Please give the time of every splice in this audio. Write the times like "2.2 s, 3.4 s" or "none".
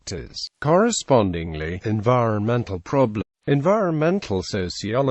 none